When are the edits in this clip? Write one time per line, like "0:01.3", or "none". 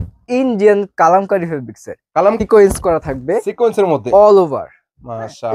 0:02.4

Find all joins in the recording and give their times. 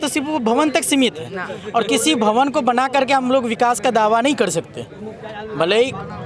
none

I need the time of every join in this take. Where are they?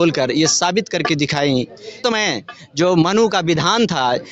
0:02.0

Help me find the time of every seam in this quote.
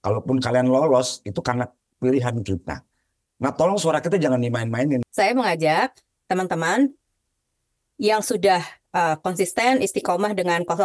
0:05.1

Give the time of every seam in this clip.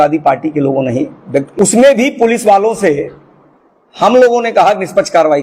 0:01.5

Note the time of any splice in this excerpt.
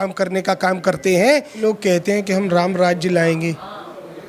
0:01.6

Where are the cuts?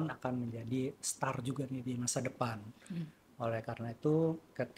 none

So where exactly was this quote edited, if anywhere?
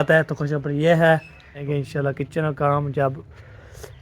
0:01.6

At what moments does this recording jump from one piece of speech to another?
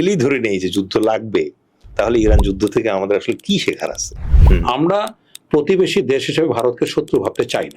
0:04.3

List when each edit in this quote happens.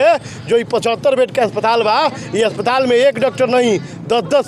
none

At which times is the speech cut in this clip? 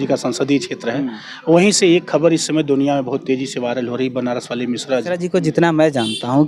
0:05.2

